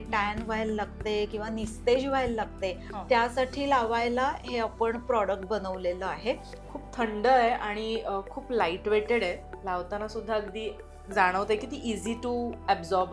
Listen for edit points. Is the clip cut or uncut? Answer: cut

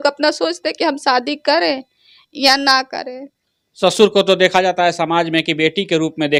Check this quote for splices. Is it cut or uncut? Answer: uncut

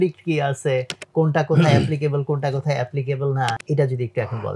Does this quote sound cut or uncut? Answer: cut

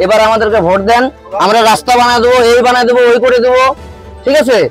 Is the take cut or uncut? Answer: uncut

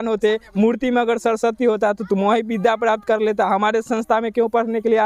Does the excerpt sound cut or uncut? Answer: uncut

